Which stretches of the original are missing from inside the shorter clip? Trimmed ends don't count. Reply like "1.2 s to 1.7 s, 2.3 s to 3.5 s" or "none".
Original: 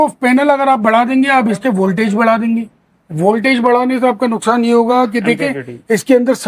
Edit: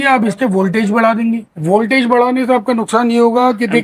2.7 s to 3.0 s